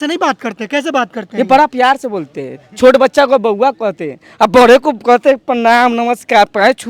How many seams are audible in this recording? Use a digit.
0